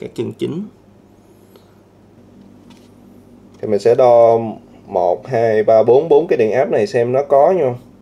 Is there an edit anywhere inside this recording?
yes; 1 cut; at 2.2 s

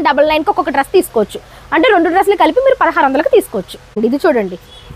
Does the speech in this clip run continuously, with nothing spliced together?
yes; 0 cuts

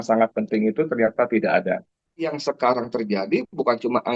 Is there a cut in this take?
yes; 1 cut; at 2.4 s

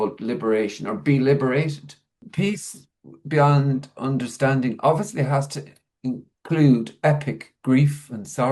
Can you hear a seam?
yes; 1 cut; at 2.2 s

